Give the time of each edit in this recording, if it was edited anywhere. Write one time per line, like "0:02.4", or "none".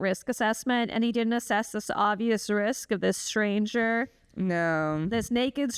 none